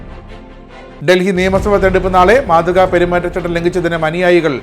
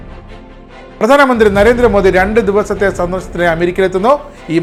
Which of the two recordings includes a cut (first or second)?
first